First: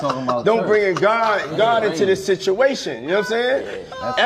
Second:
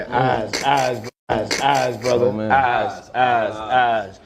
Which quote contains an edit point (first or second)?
second